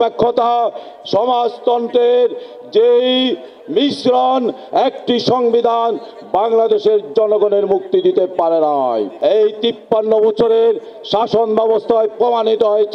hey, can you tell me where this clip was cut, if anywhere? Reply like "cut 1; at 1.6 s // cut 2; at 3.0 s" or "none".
cut 1; at 9.1 s

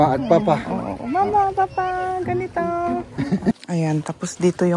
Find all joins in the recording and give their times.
cut 1; at 3.6 s

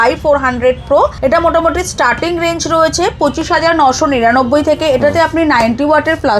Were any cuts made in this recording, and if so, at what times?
cut 1; at 1.2 s

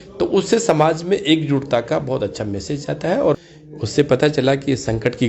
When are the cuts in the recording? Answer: cut 1; at 3.4 s

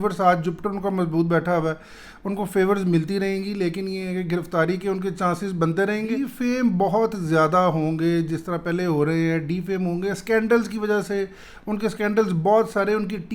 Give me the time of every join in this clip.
cut 1; at 6.3 s

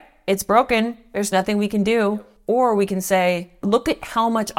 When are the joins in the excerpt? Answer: cut 1; at 2.3 s // cut 2; at 3.6 s

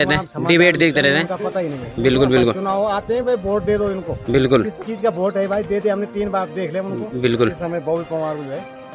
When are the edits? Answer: none

